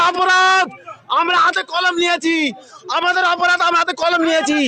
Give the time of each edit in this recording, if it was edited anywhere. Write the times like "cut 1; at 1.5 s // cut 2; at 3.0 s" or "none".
none